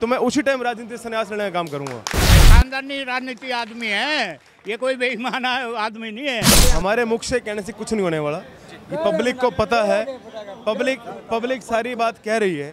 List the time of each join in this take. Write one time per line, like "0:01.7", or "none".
0:02.5
0:06.6